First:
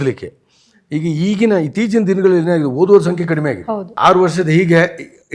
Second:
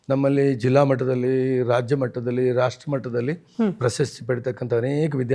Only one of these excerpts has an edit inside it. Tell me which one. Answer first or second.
first